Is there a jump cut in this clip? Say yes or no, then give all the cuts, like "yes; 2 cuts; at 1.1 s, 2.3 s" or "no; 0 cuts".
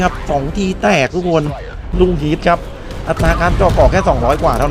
yes; 1 cut; at 1.8 s